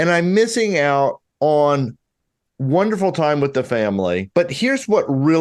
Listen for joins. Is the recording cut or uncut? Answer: cut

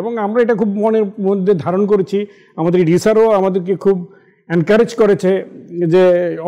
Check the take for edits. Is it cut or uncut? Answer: uncut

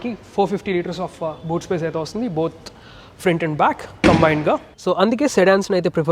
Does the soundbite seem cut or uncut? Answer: cut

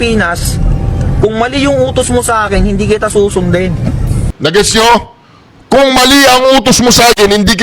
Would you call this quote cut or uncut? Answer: cut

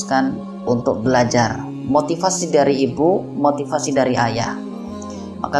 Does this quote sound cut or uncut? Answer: uncut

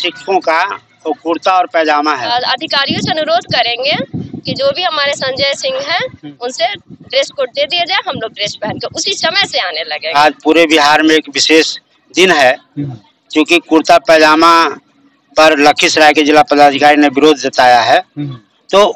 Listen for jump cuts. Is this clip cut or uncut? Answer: cut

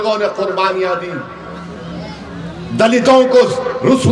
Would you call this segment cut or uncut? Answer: uncut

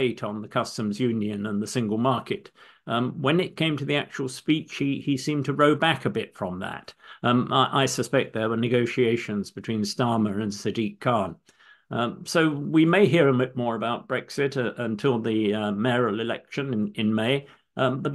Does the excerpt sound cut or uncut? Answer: uncut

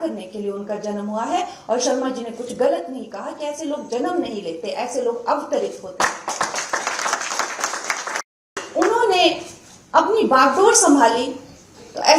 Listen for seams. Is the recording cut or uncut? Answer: cut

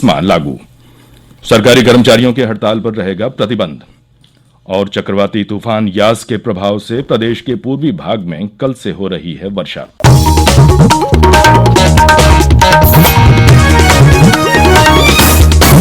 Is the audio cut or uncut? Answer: cut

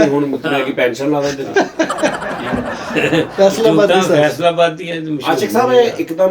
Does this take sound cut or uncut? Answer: uncut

